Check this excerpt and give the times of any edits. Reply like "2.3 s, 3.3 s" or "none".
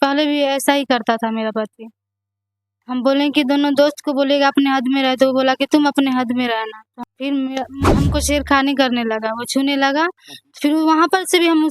6.9 s

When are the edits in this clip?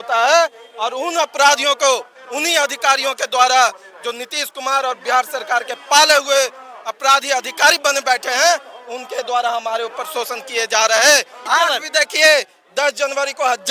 11.4 s

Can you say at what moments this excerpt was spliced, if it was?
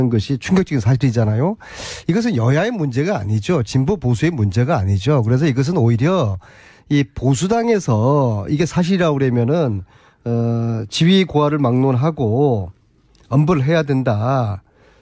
none

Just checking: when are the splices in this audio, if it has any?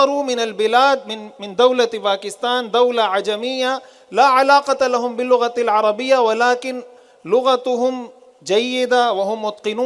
none

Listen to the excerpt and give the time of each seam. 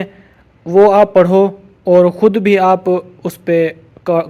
none

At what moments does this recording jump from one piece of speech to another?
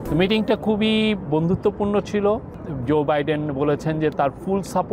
none

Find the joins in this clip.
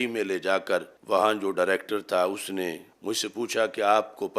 0.9 s, 2.9 s

